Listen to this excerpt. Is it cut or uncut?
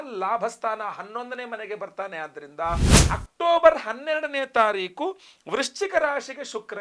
cut